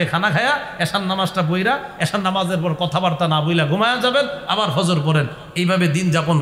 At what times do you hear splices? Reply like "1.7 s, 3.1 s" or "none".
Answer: none